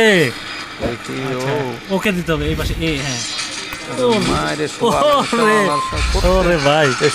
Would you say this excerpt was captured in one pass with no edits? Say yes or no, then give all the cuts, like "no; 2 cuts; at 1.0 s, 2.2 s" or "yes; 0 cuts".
yes; 0 cuts